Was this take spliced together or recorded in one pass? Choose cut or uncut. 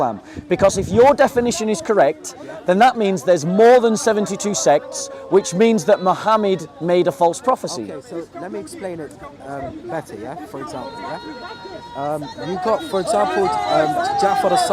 uncut